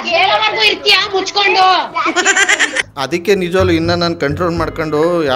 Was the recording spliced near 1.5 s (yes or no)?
no